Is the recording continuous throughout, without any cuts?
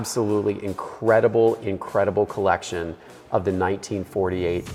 yes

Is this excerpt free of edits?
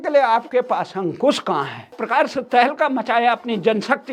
no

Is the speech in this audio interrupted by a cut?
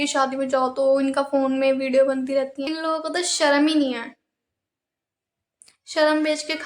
yes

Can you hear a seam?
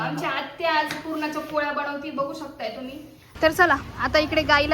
yes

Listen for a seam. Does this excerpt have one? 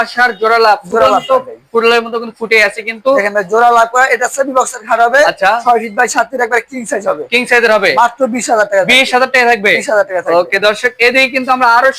no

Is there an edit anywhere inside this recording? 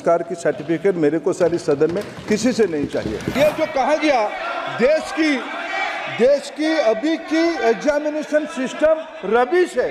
yes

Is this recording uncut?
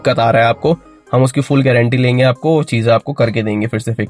yes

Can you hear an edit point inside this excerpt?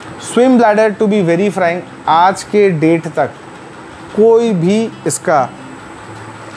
no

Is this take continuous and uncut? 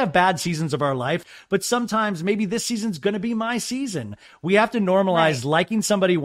no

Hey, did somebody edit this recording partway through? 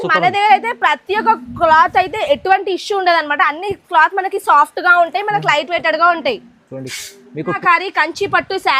yes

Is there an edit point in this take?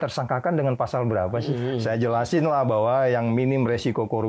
yes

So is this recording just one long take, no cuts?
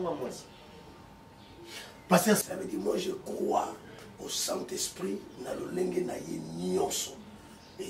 no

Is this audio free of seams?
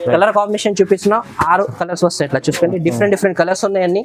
yes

